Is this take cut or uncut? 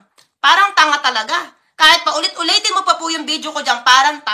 uncut